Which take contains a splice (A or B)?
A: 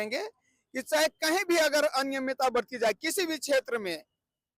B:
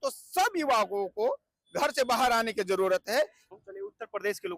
B